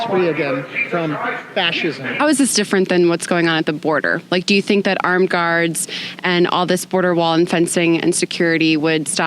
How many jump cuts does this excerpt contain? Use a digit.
1